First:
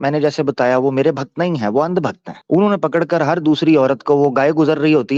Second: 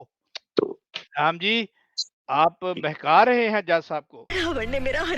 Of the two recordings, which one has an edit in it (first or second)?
second